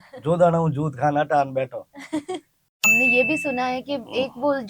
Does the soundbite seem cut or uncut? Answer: cut